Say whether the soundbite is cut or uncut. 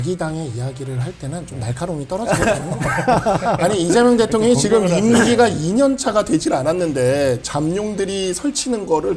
uncut